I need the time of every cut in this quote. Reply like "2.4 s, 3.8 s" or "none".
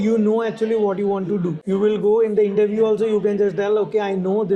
1.6 s